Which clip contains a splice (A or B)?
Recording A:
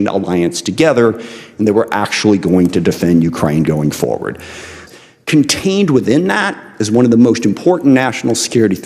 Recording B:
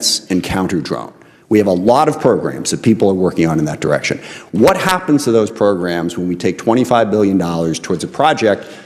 A